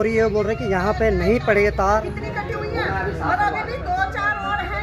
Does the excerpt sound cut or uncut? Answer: cut